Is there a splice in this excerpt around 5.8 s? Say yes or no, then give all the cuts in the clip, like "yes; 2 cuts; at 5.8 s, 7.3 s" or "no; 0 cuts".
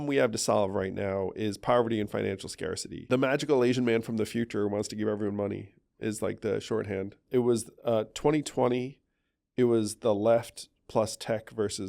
no; 2 cuts; at 2.9 s, 7.2 s